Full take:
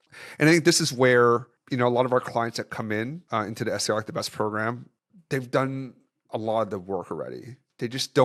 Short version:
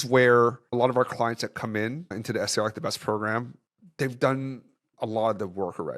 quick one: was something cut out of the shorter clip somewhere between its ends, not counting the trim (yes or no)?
yes